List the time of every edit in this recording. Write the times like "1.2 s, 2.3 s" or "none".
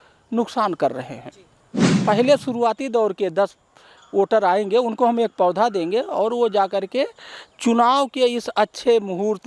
2.0 s